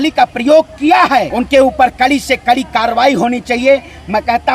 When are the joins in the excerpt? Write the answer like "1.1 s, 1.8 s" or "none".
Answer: 1.3 s